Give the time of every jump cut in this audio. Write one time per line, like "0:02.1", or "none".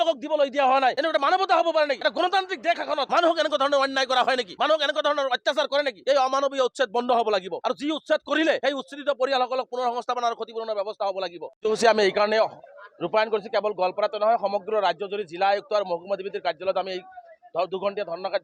0:01.0
0:02.0
0:03.1
0:04.5
0:06.0
0:07.5
0:08.6
0:11.4